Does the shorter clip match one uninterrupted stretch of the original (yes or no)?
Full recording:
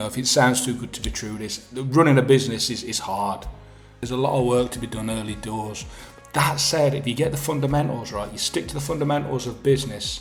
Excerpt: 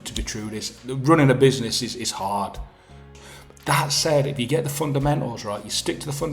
no